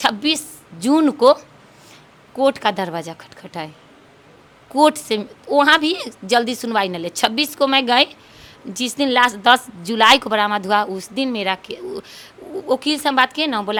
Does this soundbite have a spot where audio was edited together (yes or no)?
no